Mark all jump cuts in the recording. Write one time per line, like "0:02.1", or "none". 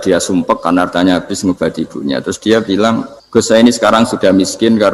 0:03.1